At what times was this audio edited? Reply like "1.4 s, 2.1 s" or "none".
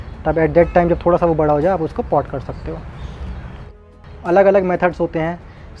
3.7 s